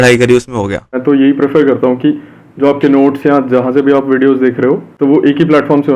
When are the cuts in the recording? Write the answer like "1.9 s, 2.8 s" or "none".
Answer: 1.0 s, 4.9 s